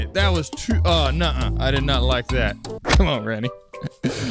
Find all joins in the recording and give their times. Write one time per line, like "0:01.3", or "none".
0:02.7